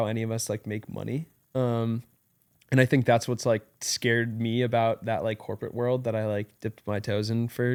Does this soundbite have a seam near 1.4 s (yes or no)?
no